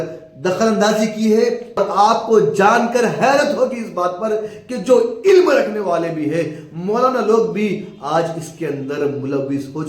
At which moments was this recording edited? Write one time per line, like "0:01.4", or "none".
0:01.8

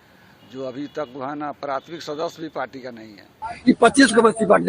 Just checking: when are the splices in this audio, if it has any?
0:03.5

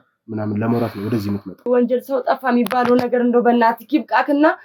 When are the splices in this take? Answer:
0:01.7

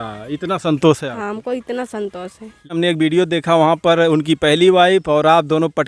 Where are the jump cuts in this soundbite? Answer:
0:02.7

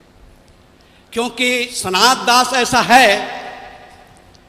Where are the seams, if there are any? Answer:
0:01.7

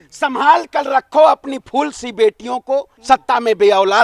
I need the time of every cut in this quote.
0:02.9

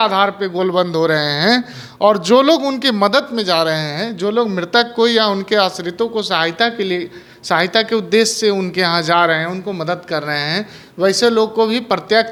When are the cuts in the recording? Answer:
none

